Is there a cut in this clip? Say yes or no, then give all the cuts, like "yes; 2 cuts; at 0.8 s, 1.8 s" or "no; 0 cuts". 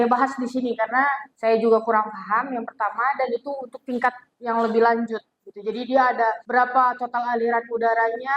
yes; 2 cuts; at 1.3 s, 6.4 s